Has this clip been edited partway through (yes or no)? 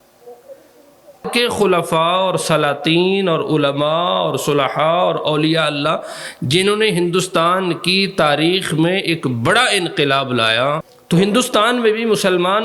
yes